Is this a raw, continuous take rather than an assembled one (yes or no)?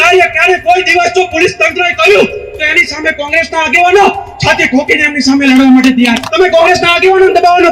no